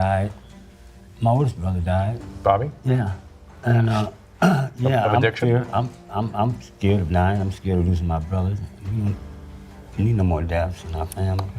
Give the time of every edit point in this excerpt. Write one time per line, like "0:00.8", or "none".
none